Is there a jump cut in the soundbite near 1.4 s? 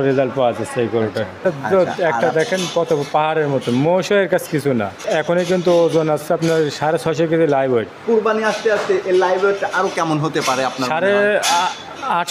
yes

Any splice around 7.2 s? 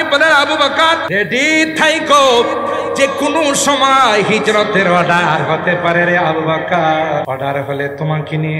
yes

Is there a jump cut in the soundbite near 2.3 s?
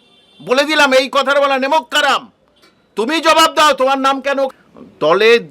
no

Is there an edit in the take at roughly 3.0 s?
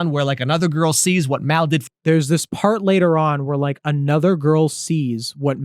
no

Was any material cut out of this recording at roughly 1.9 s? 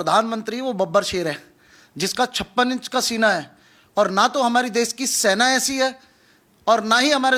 no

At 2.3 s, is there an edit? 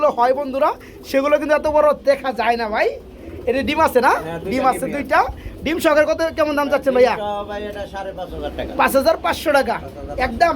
no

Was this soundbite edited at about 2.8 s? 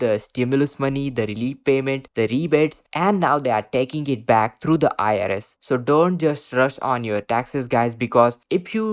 no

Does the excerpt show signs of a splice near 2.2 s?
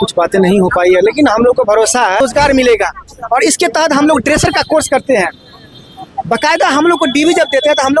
yes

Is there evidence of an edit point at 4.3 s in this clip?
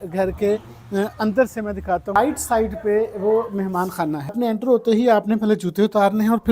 yes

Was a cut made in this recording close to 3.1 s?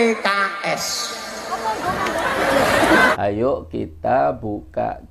yes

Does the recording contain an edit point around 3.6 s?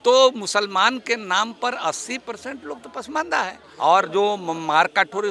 yes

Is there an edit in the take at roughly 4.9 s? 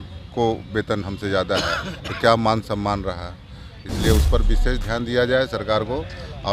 no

